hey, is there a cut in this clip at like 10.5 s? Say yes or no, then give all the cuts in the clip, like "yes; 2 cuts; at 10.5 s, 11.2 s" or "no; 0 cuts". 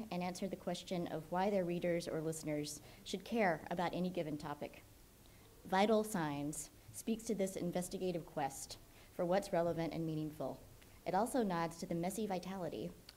yes; 1 cut; at 10.5 s